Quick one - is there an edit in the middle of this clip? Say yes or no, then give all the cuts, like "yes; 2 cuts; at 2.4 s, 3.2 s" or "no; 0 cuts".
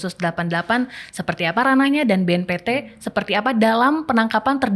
no; 0 cuts